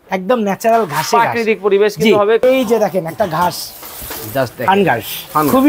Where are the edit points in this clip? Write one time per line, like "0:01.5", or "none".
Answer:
0:02.4

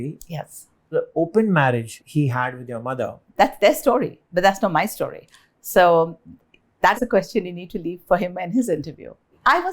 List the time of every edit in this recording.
none

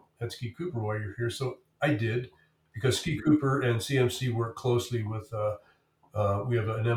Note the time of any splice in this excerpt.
none

